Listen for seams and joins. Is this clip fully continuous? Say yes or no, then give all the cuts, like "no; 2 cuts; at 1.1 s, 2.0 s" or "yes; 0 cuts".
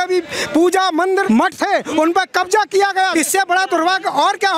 no; 2 cuts; at 1.2 s, 3.1 s